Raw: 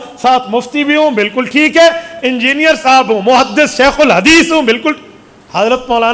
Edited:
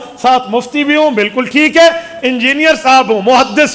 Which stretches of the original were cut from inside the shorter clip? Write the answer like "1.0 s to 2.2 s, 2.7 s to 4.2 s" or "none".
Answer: none